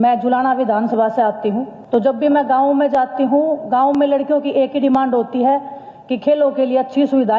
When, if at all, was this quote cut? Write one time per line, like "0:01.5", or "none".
0:01.7